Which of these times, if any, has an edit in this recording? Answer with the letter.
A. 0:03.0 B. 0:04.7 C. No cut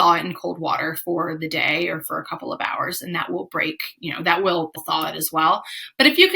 B